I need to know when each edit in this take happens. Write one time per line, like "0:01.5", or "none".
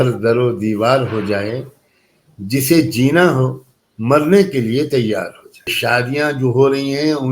0:05.7